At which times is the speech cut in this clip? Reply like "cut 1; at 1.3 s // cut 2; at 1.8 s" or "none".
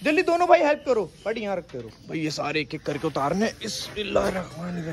none

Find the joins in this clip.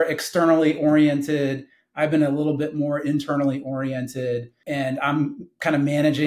cut 1; at 4.6 s

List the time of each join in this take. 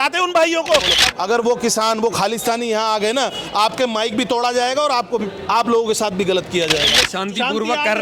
cut 1; at 1.0 s // cut 2; at 7.0 s

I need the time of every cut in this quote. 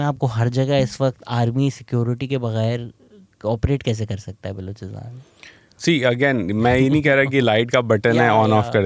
none

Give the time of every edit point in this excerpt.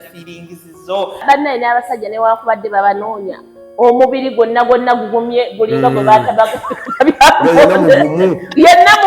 cut 1; at 1.2 s

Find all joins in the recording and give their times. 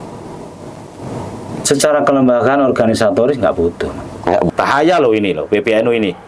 cut 1; at 4.5 s

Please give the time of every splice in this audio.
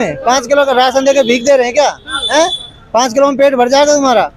none

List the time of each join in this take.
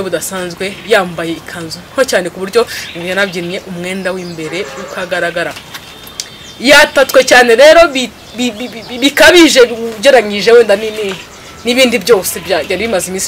none

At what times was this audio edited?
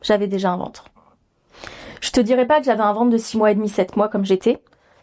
none

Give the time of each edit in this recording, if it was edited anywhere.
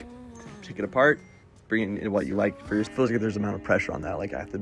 cut 1; at 2.9 s

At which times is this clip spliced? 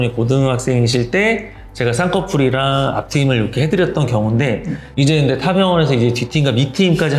cut 1; at 4.8 s

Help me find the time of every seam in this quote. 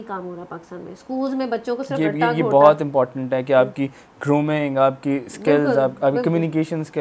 none

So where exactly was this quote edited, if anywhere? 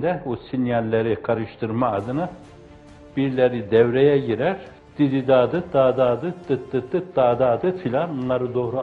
cut 1; at 4.7 s

